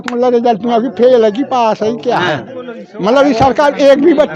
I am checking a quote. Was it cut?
no; 0 cuts

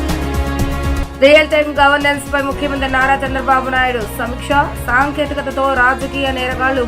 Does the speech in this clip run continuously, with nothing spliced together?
no; 1 cut; at 1.0 s

